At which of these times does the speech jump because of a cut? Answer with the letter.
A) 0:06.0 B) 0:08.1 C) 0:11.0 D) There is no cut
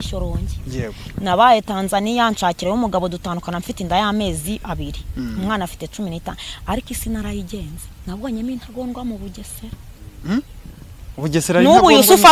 D